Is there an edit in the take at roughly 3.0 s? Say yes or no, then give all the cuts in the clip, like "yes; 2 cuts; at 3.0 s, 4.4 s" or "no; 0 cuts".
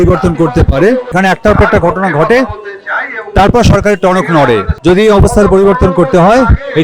no; 2 cuts; at 1.1 s, 4.7 s